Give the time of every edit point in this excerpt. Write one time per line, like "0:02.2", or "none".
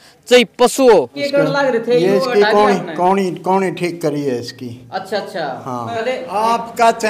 0:01.2
0:05.9